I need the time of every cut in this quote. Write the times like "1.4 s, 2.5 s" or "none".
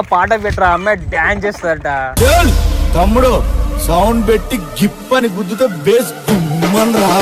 none